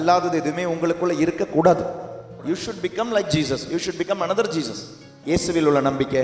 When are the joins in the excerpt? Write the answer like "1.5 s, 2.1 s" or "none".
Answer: 2.3 s, 5.2 s